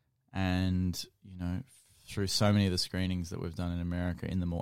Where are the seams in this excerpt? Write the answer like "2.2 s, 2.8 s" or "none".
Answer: none